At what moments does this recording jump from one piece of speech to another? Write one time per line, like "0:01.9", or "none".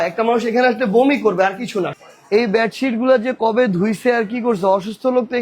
0:01.9